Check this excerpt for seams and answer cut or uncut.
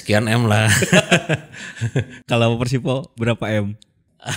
uncut